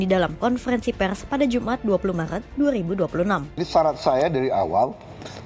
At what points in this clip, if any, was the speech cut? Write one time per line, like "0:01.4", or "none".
0:03.5